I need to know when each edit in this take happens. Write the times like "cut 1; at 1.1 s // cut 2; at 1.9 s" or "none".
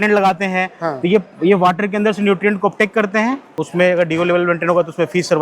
cut 1; at 3.6 s

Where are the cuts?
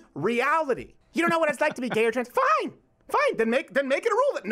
cut 1; at 0.9 s

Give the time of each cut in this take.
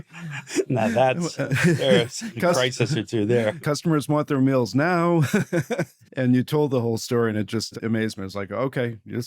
cut 1; at 3.6 s // cut 2; at 6.0 s // cut 3; at 7.7 s

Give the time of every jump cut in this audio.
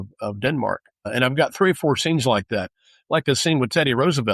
cut 1; at 1.1 s

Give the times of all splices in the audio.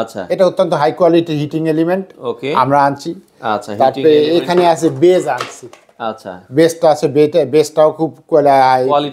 none

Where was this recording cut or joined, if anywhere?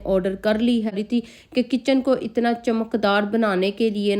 cut 1; at 0.9 s

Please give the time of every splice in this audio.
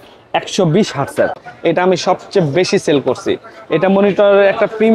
cut 1; at 1.4 s

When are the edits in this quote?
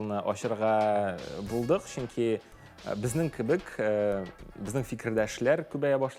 none

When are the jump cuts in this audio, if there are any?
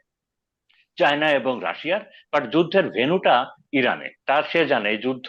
cut 1; at 4.1 s

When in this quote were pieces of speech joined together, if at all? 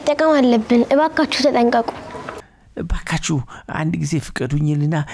cut 1; at 2.5 s

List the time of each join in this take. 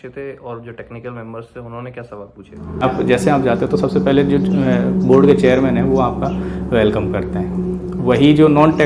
none

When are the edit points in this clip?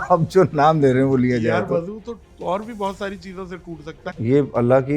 cut 1; at 4.0 s

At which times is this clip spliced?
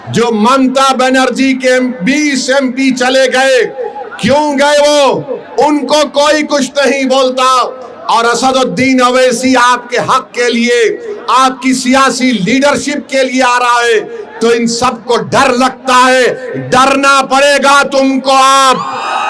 none

